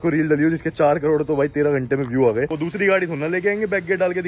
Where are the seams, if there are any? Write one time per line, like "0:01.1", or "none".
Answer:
0:02.5